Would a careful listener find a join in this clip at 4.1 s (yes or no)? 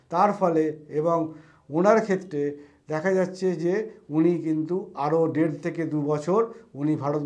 no